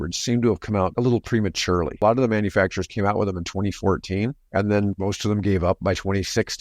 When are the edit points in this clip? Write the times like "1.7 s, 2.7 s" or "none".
0.9 s, 2.0 s